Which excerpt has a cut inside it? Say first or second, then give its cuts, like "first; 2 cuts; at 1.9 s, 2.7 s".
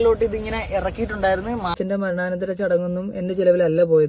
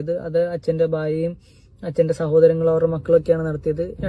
first; 1 cut; at 1.7 s